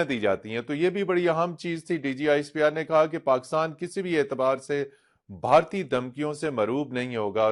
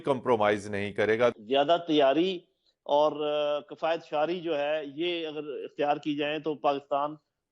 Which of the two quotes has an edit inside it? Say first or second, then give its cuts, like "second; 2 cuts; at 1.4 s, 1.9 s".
second; 1 cut; at 1.3 s